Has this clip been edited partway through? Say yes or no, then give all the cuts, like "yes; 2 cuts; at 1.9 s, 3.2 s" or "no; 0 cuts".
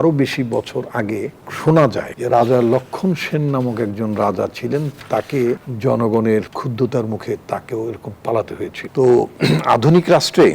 yes; 5 cuts; at 1.4 s, 2.1 s, 5.7 s, 6.5 s, 8.8 s